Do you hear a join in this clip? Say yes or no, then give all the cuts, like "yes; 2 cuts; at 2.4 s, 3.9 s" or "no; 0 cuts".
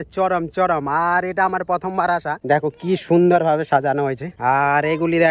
yes; 2 cuts; at 2.4 s, 4.3 s